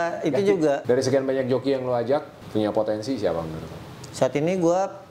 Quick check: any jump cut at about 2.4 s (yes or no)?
yes